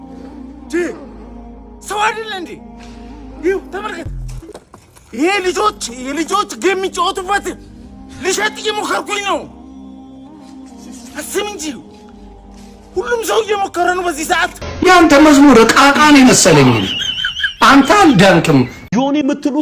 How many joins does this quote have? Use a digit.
1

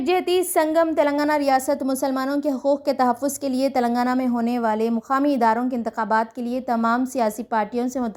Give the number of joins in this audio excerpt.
0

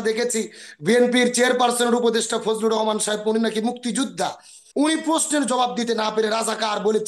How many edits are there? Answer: 1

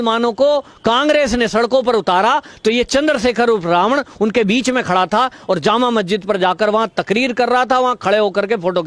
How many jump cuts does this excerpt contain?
0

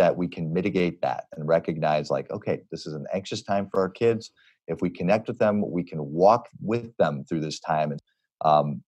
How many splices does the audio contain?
1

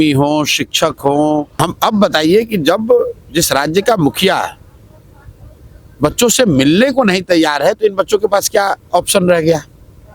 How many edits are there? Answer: 1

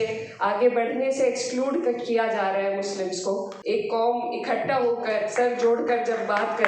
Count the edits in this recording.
1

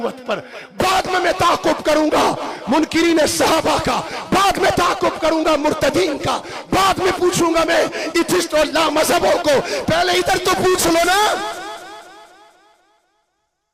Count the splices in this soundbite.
0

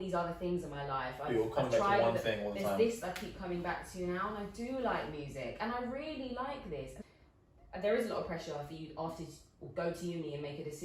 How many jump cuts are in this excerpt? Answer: 1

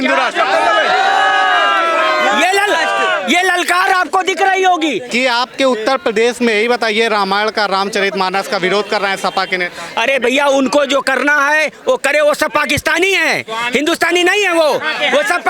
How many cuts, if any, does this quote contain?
1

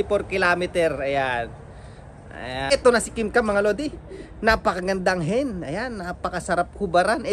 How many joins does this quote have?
1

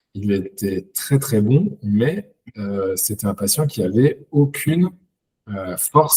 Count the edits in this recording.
0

